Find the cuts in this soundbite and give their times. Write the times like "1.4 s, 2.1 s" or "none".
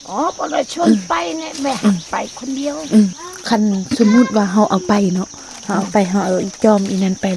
3.3 s